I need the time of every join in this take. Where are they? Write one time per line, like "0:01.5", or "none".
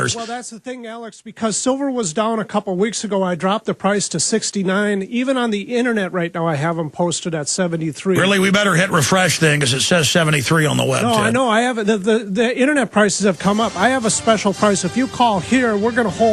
0:14.6